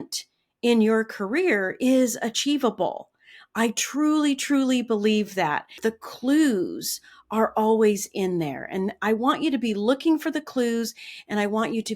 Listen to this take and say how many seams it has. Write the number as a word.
one